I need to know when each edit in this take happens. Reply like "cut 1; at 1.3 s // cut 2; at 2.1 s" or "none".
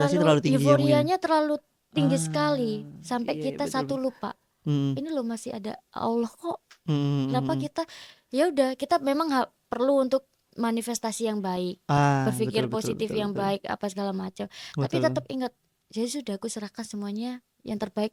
none